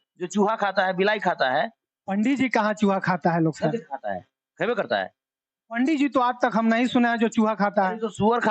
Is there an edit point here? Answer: no; 0 cuts

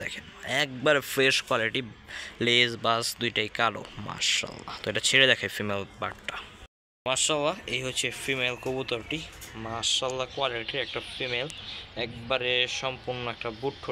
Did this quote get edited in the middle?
no; 0 cuts

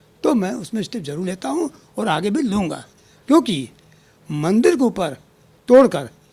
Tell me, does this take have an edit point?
no; 0 cuts

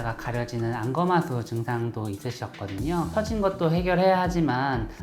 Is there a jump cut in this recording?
no; 0 cuts

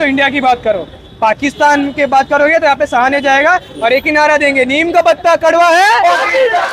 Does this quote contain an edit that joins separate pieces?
no; 0 cuts

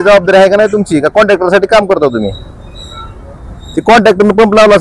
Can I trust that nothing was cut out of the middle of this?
yes; 0 cuts

